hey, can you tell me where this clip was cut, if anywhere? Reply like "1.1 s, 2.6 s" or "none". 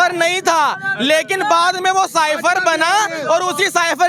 none